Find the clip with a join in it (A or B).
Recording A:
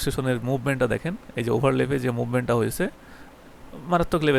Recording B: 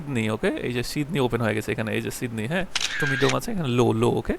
B